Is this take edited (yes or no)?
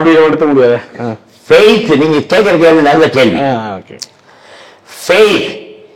no